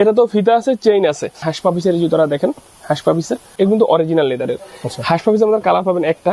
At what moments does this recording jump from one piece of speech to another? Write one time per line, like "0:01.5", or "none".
0:01.5
0:03.5